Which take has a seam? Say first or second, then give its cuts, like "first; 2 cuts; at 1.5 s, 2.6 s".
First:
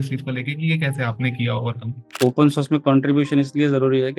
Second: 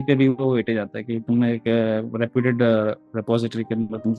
first; 1 cut; at 2.2 s